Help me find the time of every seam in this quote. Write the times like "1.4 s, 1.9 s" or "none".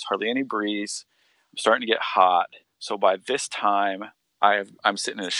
none